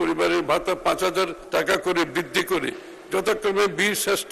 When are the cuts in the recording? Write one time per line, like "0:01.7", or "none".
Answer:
0:01.4